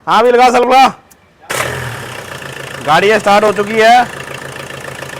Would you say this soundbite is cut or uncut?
cut